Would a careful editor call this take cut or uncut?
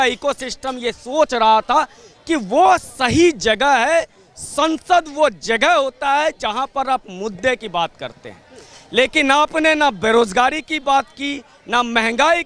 uncut